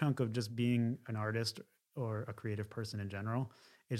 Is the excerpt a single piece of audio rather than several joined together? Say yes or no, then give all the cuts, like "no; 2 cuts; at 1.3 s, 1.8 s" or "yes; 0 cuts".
yes; 0 cuts